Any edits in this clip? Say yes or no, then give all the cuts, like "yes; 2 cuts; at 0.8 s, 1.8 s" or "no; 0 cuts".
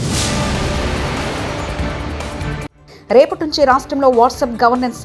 no; 0 cuts